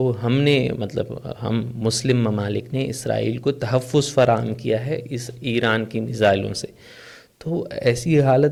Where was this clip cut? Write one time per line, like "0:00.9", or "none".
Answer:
none